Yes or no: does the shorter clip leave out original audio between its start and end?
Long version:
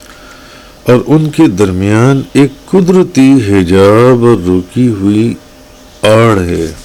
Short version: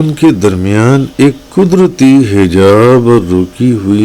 no